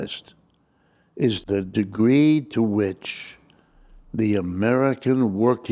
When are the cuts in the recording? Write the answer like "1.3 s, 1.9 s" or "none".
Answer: 1.4 s